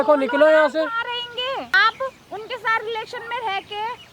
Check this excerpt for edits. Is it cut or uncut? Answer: cut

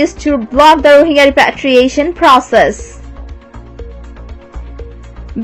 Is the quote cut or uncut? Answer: uncut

